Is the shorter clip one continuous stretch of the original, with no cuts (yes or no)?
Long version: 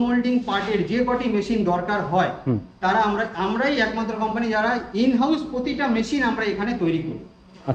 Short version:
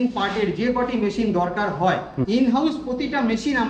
no